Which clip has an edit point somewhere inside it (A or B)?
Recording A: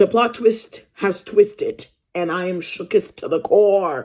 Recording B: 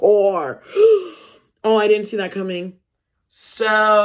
B